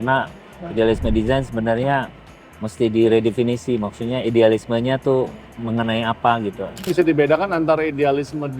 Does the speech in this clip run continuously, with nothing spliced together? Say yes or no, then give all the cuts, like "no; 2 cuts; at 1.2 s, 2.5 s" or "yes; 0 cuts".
no; 1 cut; at 6.9 s